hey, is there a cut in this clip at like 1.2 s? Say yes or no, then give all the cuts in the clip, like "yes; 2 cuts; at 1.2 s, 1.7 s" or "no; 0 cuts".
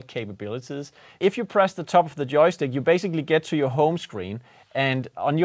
yes; 1 cut; at 1.2 s